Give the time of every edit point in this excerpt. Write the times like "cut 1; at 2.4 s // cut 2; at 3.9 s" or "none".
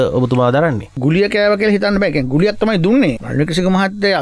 cut 1; at 1.0 s // cut 2; at 3.2 s